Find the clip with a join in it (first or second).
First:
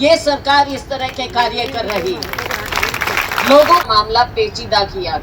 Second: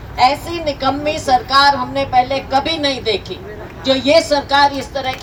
first